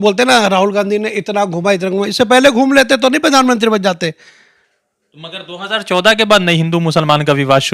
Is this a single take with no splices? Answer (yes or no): yes